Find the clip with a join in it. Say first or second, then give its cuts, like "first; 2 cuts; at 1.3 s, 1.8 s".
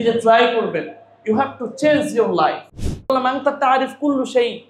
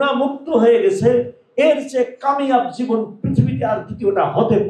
first; 1 cut; at 3.1 s